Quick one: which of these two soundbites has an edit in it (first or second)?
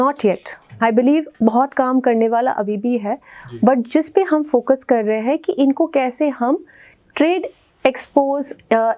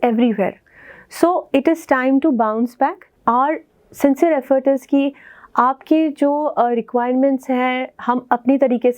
second